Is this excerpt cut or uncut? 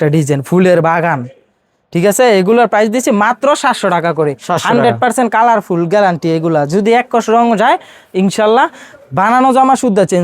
uncut